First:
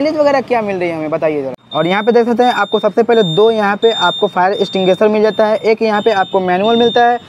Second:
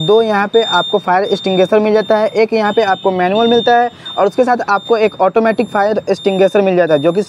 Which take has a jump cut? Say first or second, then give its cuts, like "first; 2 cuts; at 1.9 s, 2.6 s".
first; 1 cut; at 1.5 s